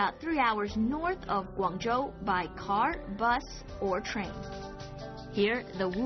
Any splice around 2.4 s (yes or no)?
no